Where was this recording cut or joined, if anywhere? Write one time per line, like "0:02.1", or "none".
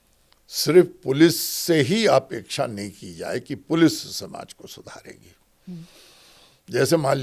none